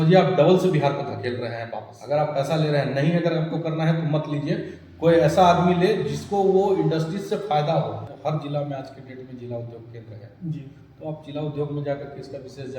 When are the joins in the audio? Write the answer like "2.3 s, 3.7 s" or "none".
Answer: 1.9 s, 8.1 s